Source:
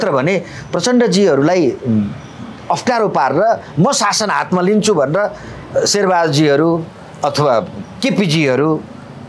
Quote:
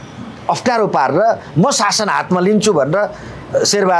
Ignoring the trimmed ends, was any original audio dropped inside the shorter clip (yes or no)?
no